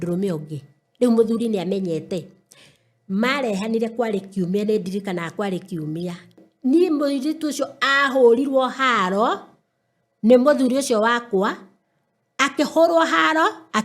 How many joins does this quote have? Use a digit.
1